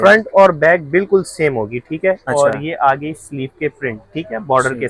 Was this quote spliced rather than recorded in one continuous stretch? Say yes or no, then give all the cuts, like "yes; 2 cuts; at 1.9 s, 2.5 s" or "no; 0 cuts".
no; 0 cuts